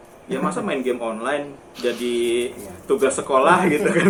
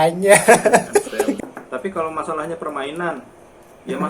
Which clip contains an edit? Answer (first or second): second